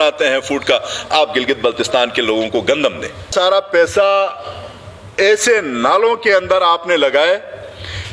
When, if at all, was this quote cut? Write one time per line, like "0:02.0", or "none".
0:03.3

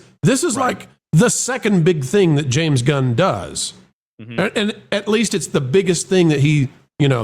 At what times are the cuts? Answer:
none

